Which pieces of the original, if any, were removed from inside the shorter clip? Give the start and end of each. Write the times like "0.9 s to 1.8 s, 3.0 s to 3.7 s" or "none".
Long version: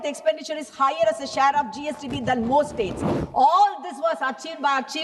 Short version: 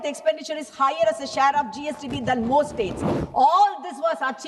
none